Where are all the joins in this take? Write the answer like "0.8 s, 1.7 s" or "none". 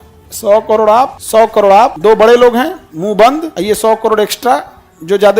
1.2 s, 1.9 s, 3.5 s